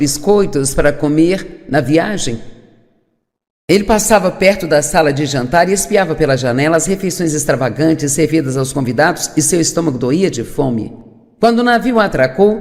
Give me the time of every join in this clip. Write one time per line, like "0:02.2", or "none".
0:06.8